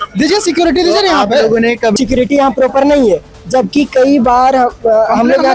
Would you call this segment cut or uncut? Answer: cut